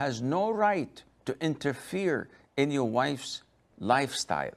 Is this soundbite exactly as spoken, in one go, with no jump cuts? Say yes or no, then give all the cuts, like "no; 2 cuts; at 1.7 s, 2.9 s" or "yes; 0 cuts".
yes; 0 cuts